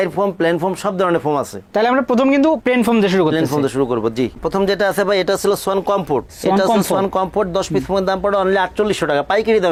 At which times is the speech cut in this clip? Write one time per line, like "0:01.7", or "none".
none